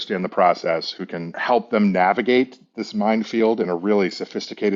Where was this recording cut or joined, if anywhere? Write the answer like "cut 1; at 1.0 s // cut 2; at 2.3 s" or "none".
cut 1; at 1.3 s